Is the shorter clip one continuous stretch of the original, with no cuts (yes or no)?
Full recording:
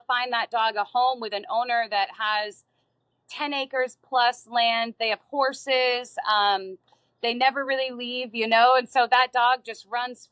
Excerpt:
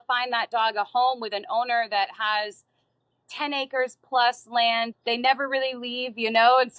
no